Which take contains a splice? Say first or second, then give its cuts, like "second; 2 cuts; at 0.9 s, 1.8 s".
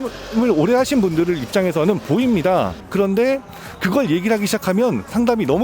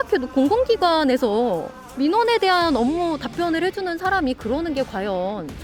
first; 1 cut; at 2.8 s